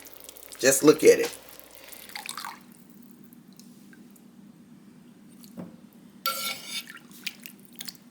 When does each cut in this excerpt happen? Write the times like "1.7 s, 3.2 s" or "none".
2.1 s